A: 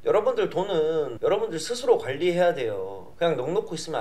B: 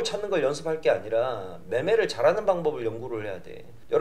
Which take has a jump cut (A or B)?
A